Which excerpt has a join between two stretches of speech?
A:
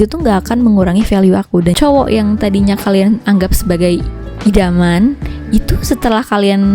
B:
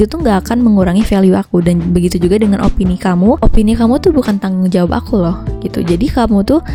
A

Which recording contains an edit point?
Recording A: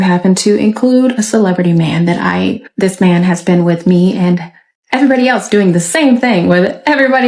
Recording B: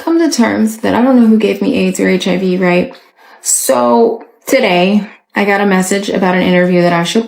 A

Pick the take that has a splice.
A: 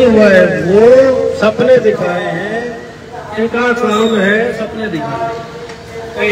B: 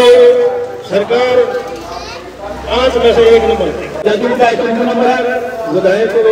B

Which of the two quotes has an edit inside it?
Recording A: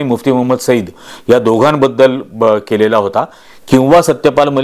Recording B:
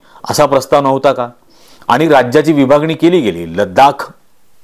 A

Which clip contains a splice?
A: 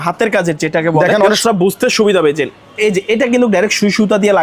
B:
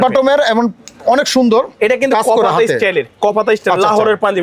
A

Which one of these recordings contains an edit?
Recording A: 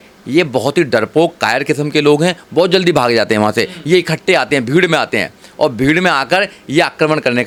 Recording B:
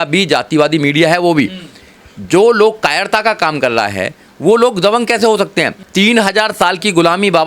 B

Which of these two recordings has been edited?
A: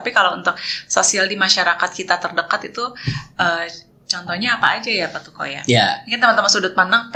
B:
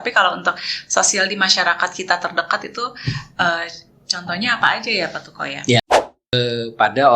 B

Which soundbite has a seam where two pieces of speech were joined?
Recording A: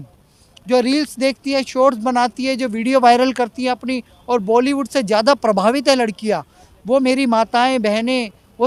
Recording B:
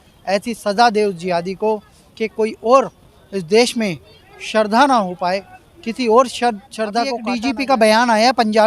B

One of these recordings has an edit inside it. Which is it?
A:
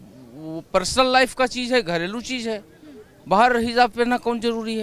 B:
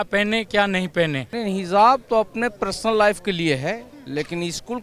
B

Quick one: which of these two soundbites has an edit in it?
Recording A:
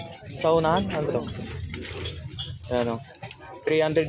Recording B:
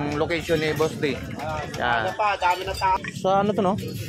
B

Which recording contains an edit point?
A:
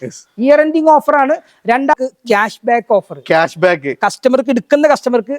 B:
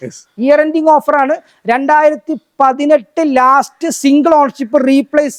A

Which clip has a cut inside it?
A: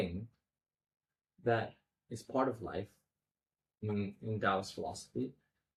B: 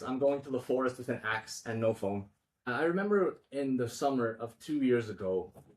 B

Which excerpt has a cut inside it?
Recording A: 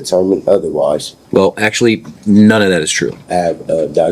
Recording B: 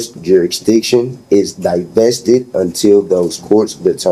A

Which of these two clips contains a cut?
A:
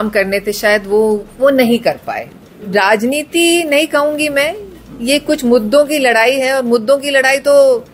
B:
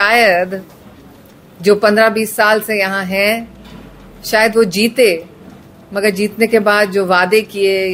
A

